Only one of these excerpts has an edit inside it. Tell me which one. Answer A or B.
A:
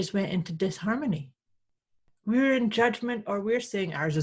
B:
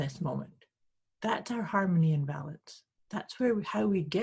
A